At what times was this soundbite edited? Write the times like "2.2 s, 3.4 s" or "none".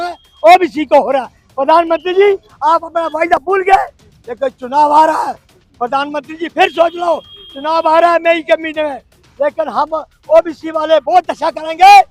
none